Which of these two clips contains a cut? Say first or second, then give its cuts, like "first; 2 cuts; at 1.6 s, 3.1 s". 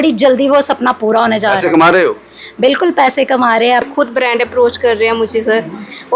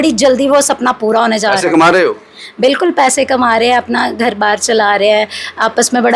first; 1 cut; at 3.9 s